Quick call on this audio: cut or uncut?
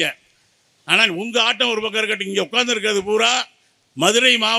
uncut